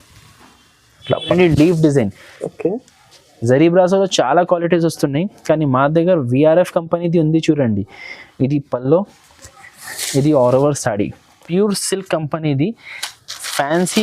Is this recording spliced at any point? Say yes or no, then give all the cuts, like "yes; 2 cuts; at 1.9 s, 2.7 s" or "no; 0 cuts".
yes; 2 cuts; at 1.3 s, 11.3 s